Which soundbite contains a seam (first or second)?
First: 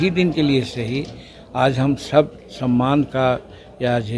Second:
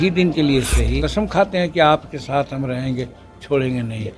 second